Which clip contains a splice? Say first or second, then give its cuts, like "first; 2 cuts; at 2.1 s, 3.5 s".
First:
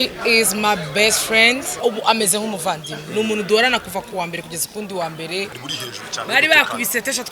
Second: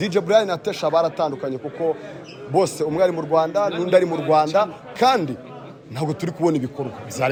first; 2 cuts; at 1.8 s, 5.6 s